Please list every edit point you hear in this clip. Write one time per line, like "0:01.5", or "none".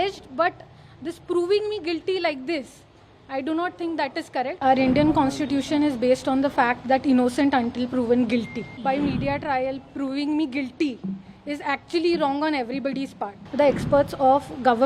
0:04.6
0:08.7
0:13.3